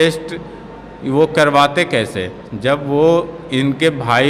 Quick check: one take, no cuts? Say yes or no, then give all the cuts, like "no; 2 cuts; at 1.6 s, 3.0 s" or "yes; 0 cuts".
yes; 0 cuts